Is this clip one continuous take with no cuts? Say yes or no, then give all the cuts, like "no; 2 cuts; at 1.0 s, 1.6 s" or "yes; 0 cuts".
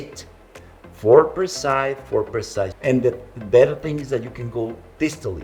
no; 1 cut; at 2.7 s